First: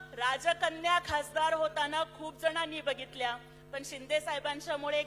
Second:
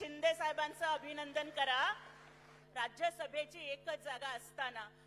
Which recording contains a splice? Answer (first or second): second